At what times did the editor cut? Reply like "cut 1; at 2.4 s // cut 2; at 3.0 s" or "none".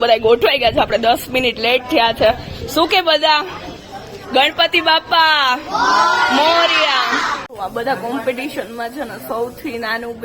cut 1; at 7.4 s